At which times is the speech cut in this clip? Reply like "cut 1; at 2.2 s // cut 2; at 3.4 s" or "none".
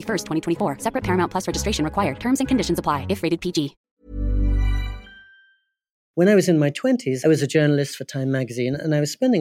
cut 1; at 5.9 s // cut 2; at 7.1 s